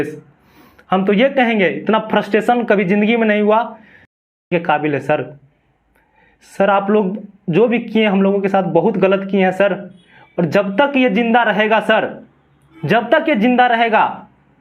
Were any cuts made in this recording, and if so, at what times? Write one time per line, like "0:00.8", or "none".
0:04.5